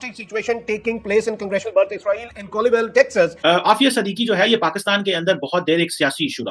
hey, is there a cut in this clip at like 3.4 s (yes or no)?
yes